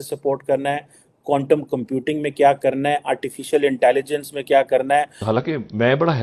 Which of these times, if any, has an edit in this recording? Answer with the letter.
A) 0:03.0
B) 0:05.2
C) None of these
B